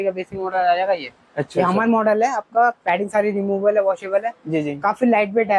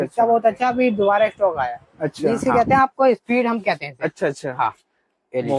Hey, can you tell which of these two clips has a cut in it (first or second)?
second